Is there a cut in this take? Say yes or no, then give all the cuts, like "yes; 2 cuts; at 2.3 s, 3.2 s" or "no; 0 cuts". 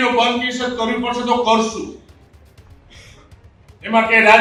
no; 0 cuts